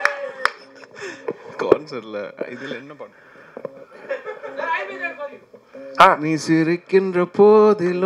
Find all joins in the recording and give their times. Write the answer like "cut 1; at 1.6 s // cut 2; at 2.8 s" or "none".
none